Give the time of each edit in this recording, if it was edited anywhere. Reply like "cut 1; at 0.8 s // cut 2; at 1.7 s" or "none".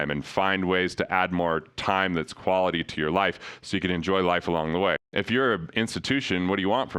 cut 1; at 5.1 s